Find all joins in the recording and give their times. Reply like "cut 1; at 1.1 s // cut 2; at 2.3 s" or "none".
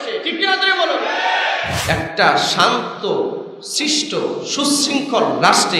cut 1; at 1.8 s